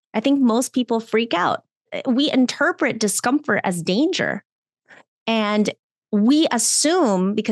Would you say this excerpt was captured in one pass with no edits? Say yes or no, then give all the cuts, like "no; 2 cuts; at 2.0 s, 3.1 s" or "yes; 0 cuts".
no; 1 cut; at 1.9 s